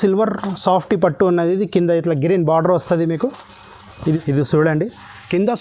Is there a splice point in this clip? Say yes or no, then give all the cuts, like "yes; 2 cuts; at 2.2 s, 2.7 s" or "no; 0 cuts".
yes; 1 cut; at 3.9 s